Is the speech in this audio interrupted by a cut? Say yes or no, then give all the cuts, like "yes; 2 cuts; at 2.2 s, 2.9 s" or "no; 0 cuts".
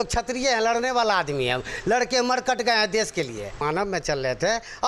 yes; 1 cut; at 3.6 s